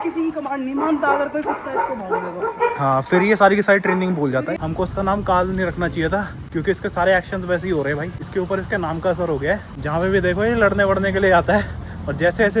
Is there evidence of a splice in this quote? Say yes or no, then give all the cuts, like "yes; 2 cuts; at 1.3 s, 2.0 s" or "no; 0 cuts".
yes; 4 cuts; at 4.6 s, 6.4 s, 8.2 s, 9.7 s